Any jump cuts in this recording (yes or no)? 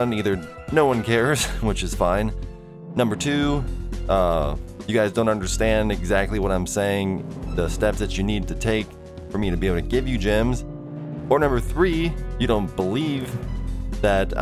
yes